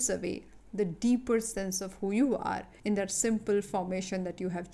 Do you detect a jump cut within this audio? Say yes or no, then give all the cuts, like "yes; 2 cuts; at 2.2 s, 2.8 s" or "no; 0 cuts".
yes; 1 cut; at 2.7 s